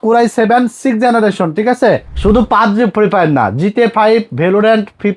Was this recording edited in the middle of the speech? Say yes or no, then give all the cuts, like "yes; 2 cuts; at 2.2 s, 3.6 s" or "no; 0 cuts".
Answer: yes; 1 cut; at 2.1 s